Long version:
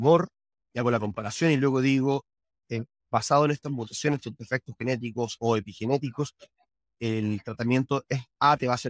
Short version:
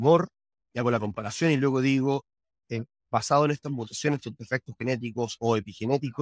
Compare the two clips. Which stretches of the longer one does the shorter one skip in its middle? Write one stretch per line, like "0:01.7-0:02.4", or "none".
none

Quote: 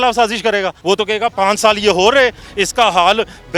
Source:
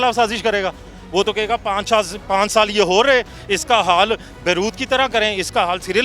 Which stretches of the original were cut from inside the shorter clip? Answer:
0:01.1-0:02.0

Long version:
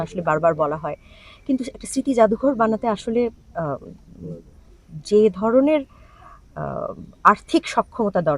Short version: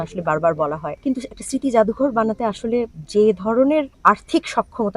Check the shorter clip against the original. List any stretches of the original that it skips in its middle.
0:00.9-0:01.3
0:03.4-0:04.9
0:05.9-0:07.1

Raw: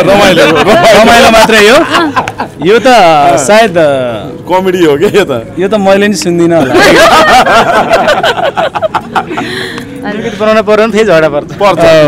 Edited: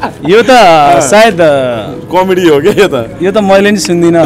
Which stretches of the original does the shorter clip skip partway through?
none

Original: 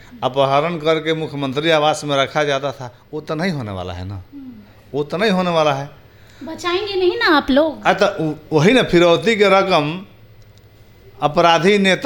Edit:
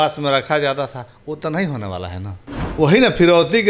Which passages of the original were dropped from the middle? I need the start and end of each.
0:04.5-0:08.4

